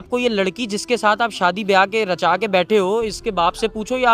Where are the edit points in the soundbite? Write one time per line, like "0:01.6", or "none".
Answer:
none